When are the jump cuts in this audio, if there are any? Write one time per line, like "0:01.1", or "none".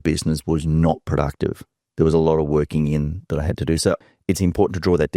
0:04.0